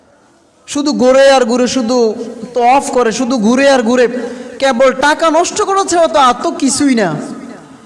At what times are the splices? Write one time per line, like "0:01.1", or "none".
none